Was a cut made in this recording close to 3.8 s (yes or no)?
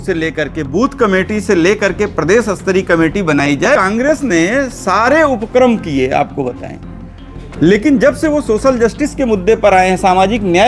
yes